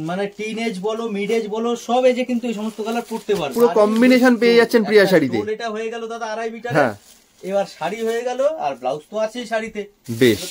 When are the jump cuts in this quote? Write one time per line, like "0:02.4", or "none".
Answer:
0:03.5